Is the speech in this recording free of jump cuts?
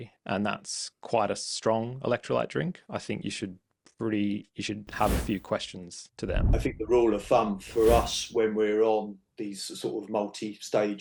no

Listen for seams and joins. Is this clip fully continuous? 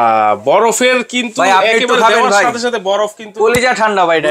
yes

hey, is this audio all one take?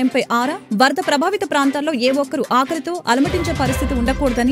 yes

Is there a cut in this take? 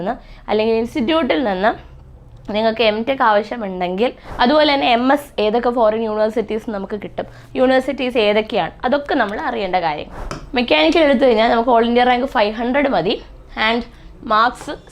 yes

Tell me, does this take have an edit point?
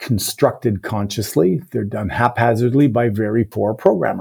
no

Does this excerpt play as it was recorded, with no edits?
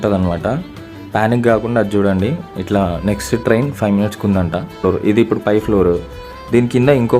no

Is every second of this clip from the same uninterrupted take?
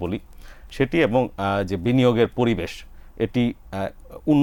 yes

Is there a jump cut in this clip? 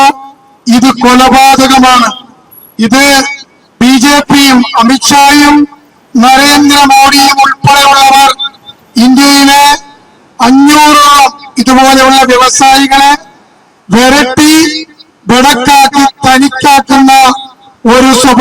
no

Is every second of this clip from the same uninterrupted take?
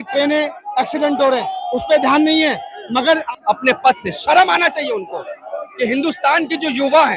no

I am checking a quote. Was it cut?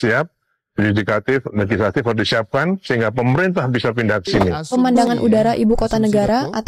yes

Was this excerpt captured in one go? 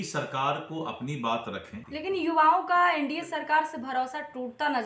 no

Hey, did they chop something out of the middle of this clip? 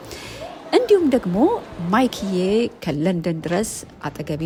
no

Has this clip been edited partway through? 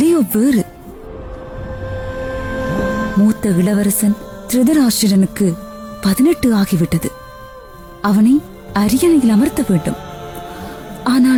no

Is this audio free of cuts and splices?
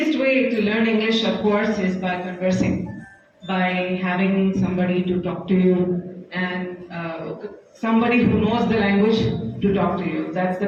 yes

